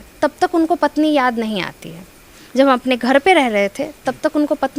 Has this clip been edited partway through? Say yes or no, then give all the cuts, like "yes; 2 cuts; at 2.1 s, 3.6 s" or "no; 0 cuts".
no; 0 cuts